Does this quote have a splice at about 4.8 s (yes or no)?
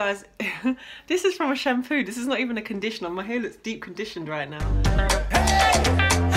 yes